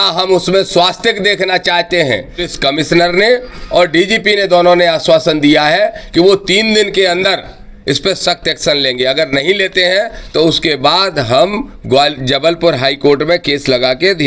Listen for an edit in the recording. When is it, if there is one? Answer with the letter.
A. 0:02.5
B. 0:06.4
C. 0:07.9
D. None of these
A